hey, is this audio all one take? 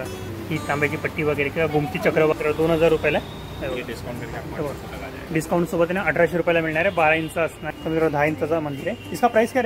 no; 2 cuts; at 2.3 s, 7.7 s

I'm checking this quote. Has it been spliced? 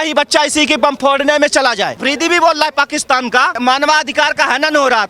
yes; 2 cuts; at 2.0 s, 3.6 s

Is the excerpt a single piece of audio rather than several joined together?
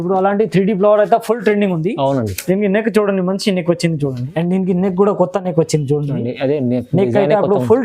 no; 1 cut; at 4.2 s

